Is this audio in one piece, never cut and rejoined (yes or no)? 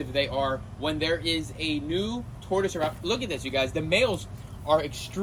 yes